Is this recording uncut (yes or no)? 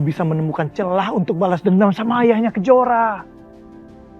no